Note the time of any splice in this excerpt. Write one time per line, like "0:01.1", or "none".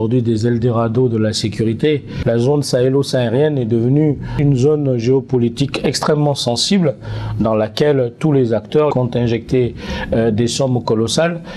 0:02.1
0:08.9